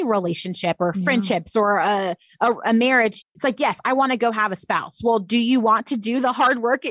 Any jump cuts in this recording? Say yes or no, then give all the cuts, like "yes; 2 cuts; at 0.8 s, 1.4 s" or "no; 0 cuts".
yes; 1 cut; at 3.2 s